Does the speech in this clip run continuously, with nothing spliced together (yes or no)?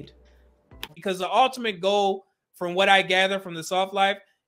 no